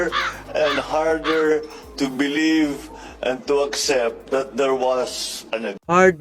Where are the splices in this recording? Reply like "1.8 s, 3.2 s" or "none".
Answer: none